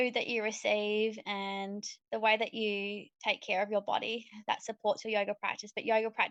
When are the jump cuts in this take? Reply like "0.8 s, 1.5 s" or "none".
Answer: none

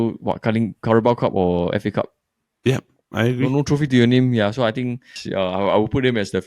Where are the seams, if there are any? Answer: 5.2 s

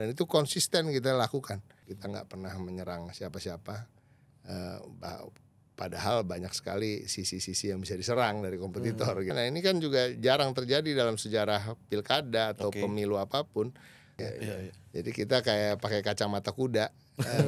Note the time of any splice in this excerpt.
1.7 s, 9.3 s, 14.2 s

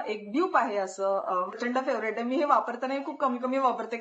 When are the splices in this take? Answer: 1.6 s

